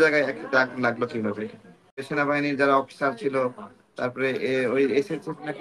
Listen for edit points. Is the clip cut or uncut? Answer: cut